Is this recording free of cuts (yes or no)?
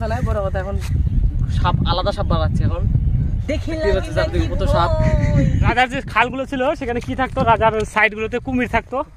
no